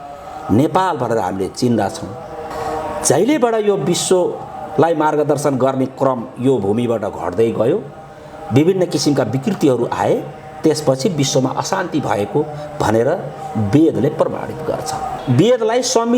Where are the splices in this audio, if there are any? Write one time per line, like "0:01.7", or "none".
0:02.5
0:15.1